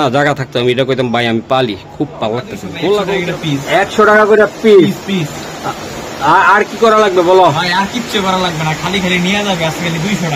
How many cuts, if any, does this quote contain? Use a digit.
1